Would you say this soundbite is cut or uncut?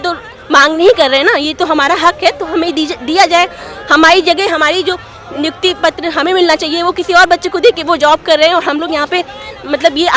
uncut